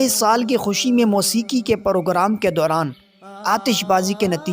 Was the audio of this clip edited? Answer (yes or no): no